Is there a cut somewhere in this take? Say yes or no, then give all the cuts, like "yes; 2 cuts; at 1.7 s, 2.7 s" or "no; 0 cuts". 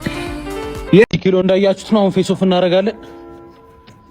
yes; 1 cut; at 1.0 s